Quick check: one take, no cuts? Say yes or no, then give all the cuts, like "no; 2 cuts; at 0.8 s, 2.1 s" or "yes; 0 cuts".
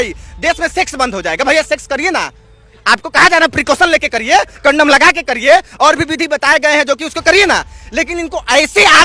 yes; 0 cuts